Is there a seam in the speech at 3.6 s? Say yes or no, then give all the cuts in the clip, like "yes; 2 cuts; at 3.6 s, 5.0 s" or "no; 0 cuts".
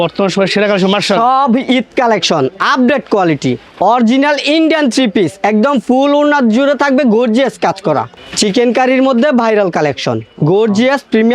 yes; 2 cuts; at 3.6 s, 8.1 s